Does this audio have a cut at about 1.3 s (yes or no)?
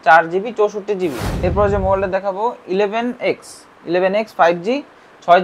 yes